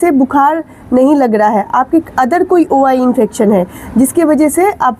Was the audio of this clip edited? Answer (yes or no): no